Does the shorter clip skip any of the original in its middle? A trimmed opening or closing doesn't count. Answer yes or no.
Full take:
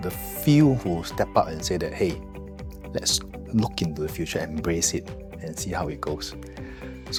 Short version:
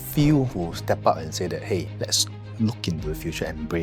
yes